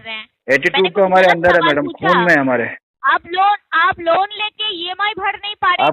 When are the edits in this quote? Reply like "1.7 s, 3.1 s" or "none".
2.9 s